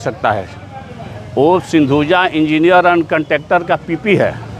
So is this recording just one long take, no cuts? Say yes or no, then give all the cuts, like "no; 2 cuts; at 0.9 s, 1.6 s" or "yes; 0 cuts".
yes; 0 cuts